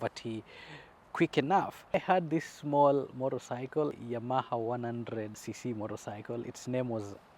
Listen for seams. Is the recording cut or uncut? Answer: cut